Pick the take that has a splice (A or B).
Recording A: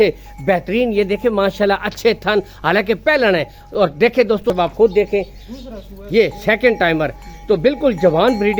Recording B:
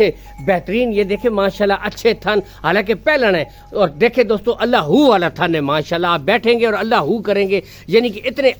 A